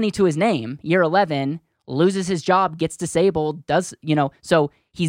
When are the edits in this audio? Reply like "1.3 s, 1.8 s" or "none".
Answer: none

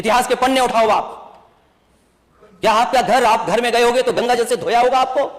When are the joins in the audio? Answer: none

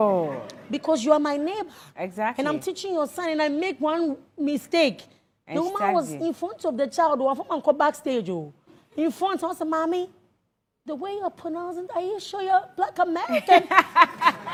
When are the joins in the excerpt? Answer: none

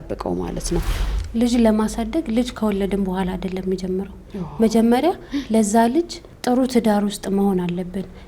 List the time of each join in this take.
1.0 s, 6.2 s

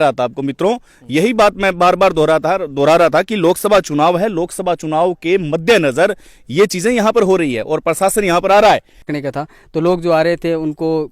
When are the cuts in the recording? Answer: 9.0 s

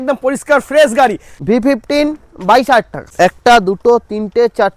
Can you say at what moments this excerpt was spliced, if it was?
1.3 s, 3.1 s

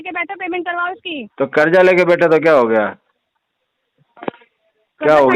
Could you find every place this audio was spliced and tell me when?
none

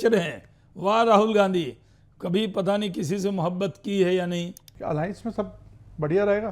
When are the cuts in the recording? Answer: 4.7 s

